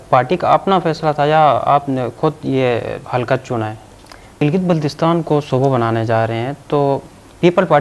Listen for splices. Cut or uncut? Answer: cut